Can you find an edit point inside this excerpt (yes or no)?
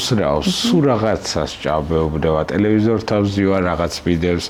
no